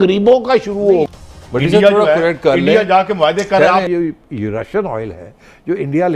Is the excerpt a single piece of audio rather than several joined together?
no; 2 cuts; at 1.1 s, 3.9 s

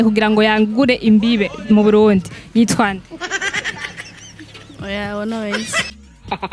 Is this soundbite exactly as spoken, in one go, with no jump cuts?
yes; 0 cuts

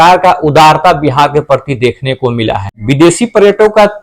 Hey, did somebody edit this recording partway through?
yes; 1 cut; at 2.7 s

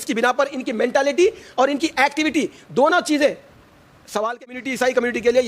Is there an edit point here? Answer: yes; 1 cut; at 4.4 s

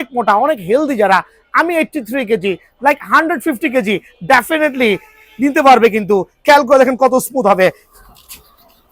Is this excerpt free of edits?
yes; 0 cuts

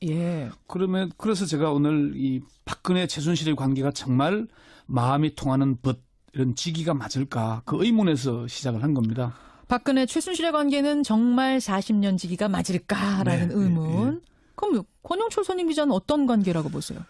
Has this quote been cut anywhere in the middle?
yes; 1 cut; at 10.5 s

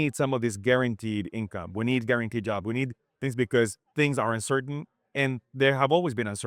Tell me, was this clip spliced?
no; 0 cuts

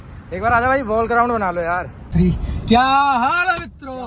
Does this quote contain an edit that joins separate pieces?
yes; 1 cut; at 1.9 s

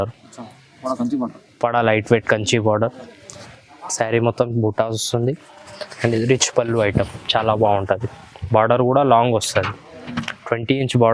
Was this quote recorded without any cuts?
yes; 0 cuts

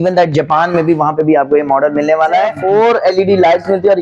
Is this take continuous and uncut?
no; 1 cut; at 2.6 s

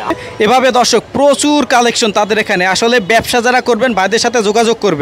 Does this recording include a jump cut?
no; 0 cuts

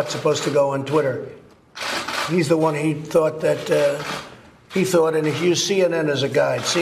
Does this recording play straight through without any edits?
yes; 0 cuts

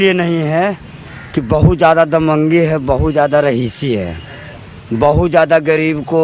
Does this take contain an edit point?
no; 0 cuts

